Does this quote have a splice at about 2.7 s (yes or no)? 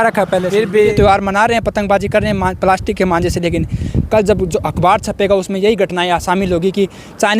no